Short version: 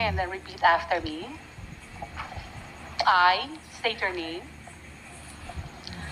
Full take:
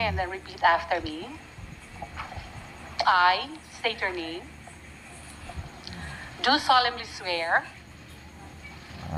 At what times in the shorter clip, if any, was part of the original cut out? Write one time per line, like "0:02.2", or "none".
none